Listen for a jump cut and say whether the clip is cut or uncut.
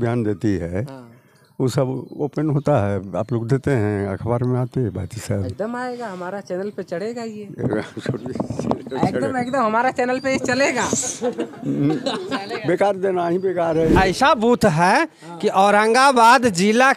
cut